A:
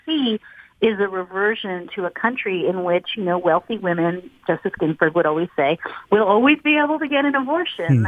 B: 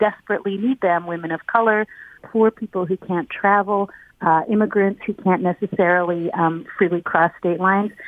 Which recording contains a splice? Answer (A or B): B